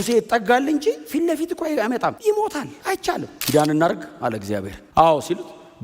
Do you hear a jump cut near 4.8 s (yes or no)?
yes